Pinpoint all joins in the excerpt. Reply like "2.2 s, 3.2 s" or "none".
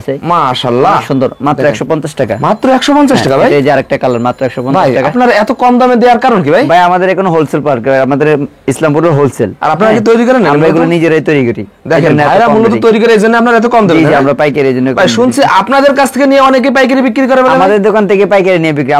none